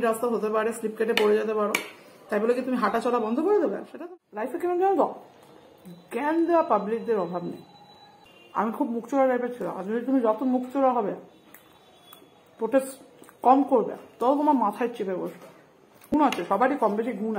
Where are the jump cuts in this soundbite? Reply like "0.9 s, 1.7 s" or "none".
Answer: 3.9 s, 8.5 s, 16.1 s